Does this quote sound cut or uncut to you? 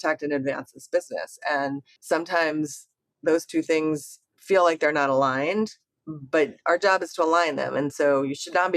cut